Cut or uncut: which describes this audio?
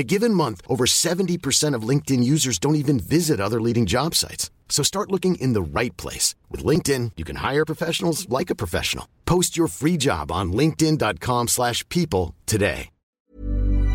cut